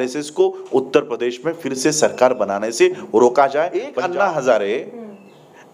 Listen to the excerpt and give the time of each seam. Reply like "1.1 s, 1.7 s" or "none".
3.9 s

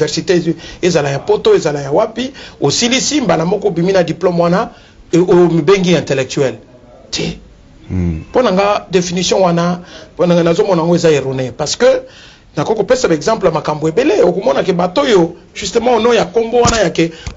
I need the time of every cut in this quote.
none

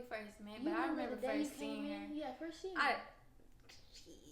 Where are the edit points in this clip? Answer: none

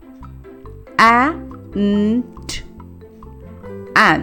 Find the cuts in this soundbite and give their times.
none

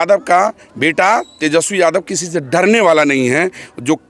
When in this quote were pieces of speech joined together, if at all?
none

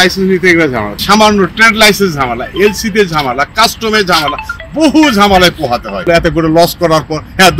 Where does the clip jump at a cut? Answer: 1.0 s, 6.1 s

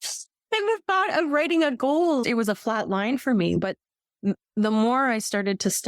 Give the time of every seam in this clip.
2.2 s, 3.6 s

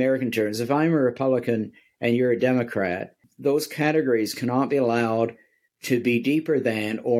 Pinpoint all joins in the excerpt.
3.2 s

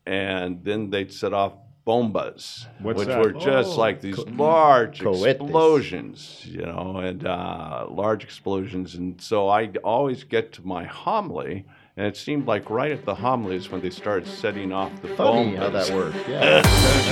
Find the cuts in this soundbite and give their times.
none

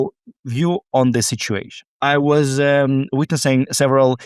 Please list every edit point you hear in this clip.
1.9 s

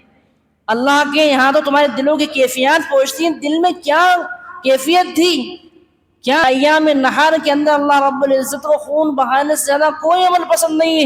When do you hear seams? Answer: 6.4 s

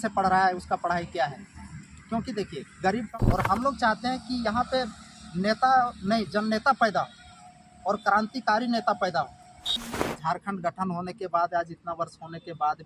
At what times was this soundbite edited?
3.2 s, 9.8 s

